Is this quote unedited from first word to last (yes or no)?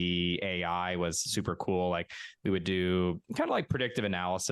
yes